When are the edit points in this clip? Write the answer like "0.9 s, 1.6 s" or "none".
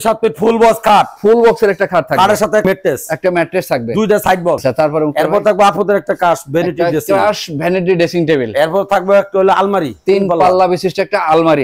2.6 s, 4.6 s